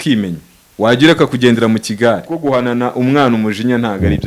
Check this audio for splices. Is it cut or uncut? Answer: cut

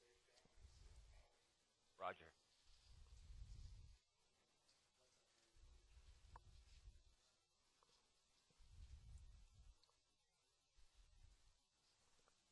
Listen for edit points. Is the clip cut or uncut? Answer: uncut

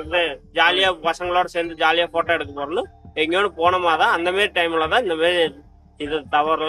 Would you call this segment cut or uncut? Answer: uncut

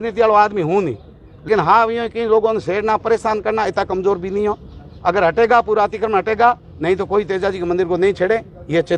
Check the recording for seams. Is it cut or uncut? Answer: cut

